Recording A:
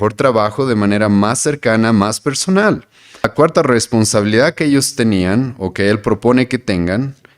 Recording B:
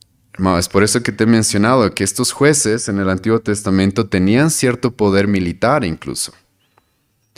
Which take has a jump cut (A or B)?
A